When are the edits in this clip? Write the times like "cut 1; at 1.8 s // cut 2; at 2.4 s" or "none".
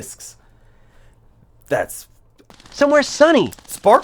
cut 1; at 2.6 s